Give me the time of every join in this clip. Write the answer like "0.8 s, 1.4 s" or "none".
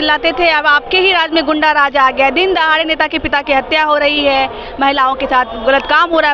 none